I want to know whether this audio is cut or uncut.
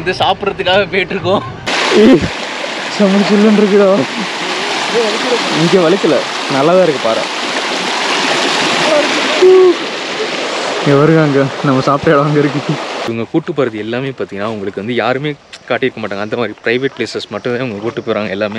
cut